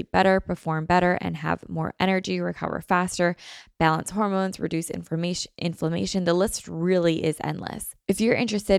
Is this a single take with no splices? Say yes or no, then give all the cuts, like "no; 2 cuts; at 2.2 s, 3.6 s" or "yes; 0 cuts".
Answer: no; 1 cut; at 7.9 s